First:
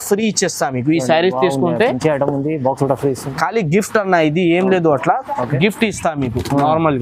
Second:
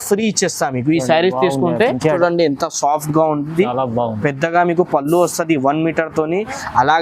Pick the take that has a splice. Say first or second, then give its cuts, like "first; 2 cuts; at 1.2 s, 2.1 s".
second; 1 cut; at 2.2 s